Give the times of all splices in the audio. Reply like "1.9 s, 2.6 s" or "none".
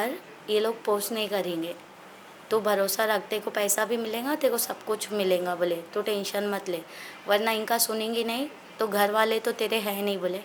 none